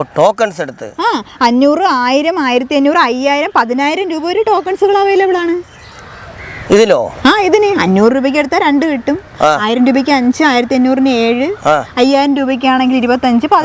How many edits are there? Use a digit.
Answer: 0